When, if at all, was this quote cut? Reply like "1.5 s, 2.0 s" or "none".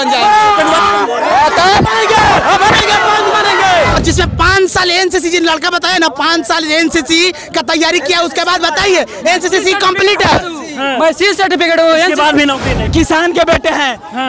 4.0 s, 12.9 s